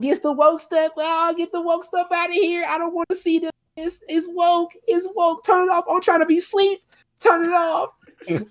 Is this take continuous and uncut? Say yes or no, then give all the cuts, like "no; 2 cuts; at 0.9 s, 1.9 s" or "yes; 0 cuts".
yes; 0 cuts